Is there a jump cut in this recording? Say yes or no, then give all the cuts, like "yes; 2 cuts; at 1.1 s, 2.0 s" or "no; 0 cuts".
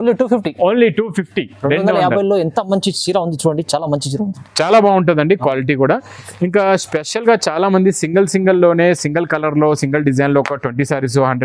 no; 0 cuts